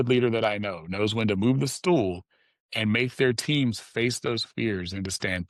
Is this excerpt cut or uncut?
uncut